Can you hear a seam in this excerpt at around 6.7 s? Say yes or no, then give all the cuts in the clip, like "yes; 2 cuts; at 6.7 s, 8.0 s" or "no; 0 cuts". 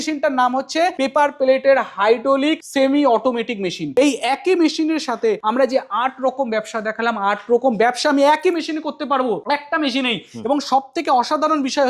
no; 5 cuts; at 0.9 s, 2.6 s, 3.8 s, 5.4 s, 9.4 s